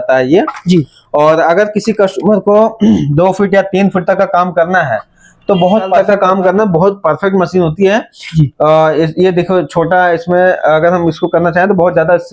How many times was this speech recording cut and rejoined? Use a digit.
1